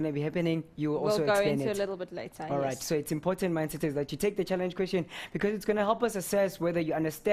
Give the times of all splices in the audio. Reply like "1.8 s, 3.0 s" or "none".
6.4 s